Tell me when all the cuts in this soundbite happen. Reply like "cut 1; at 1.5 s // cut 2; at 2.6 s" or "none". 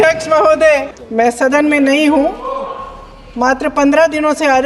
cut 1; at 1.0 s